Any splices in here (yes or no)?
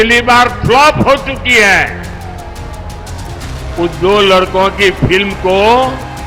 no